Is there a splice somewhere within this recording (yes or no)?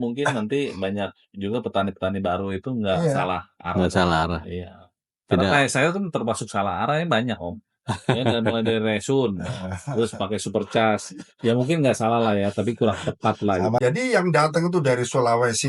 yes